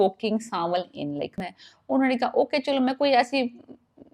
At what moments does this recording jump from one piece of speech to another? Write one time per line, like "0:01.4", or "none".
0:01.5